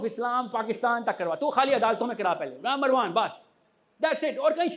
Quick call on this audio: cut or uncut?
uncut